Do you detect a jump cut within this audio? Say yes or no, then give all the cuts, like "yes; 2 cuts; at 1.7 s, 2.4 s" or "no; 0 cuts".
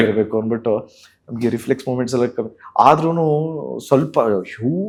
no; 0 cuts